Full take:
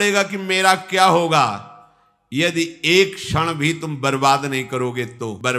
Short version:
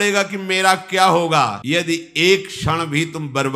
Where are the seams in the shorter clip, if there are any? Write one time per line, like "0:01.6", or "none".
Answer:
0:01.6